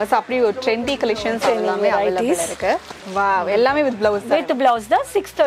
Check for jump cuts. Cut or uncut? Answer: cut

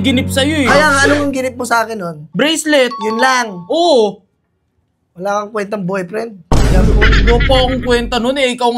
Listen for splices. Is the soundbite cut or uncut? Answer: cut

